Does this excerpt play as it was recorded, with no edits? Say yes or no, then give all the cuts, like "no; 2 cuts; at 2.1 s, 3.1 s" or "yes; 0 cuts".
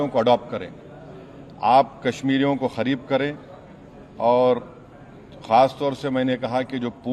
yes; 0 cuts